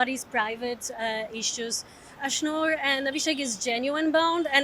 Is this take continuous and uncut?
no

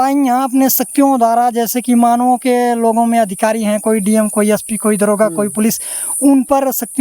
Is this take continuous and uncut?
yes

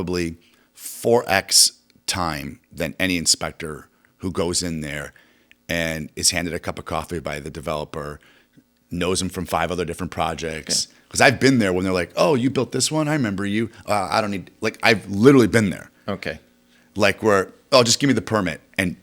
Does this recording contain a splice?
no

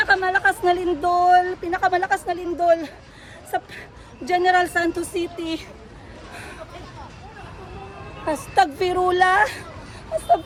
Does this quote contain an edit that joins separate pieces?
no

